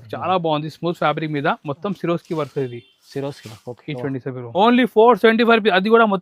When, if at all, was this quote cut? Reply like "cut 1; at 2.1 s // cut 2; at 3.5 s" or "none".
cut 1; at 4.5 s